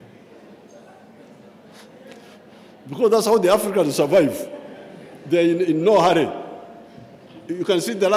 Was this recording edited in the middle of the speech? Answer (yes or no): no